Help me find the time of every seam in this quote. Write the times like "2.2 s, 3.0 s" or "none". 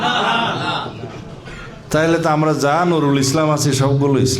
none